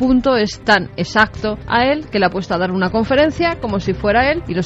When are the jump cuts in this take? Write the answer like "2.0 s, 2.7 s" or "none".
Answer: none